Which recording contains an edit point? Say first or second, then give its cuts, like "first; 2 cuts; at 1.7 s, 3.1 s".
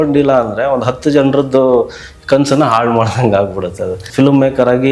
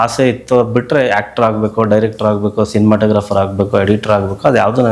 first; 1 cut; at 4.0 s